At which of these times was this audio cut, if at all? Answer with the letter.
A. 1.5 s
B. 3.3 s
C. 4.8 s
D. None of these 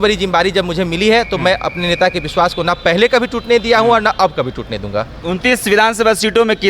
D